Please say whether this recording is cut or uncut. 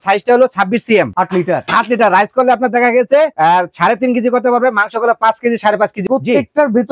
cut